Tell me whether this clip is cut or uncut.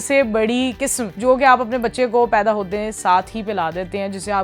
cut